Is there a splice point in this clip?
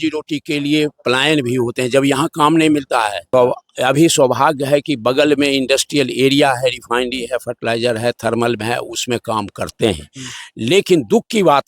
yes; 1 cut; at 3.2 s

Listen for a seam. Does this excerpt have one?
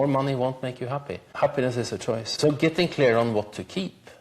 yes; 2 cuts; at 1.2 s, 2.3 s

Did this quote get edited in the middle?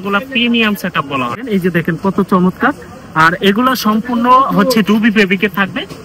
yes; 1 cut; at 1.5 s

